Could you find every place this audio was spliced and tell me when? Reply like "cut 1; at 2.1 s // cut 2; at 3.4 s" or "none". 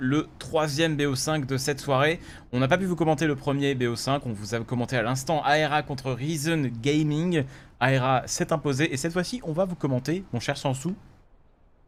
none